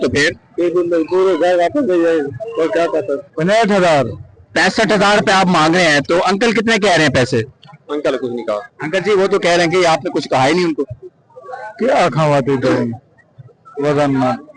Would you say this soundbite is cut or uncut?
cut